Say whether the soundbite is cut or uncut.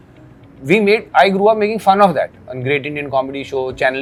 uncut